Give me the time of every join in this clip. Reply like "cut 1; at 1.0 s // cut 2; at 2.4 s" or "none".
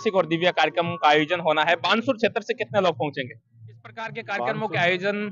cut 1; at 4.3 s